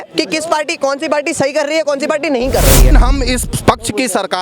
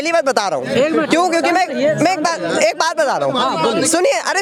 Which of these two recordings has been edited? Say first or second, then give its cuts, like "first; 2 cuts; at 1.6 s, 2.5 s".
first; 1 cut; at 2.9 s